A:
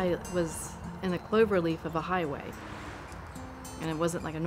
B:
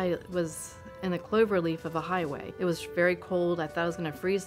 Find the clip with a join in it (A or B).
B